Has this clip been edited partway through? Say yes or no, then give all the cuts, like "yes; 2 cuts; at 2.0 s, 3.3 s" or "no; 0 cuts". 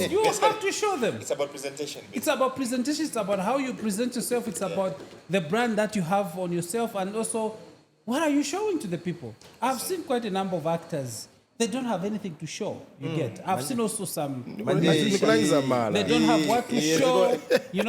no; 0 cuts